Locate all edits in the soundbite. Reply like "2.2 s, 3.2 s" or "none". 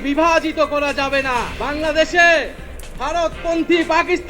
1.6 s